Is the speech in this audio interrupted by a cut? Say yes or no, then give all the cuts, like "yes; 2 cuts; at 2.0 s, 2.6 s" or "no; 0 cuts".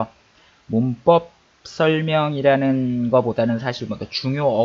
no; 0 cuts